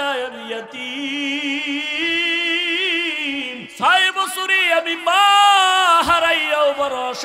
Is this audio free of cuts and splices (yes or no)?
no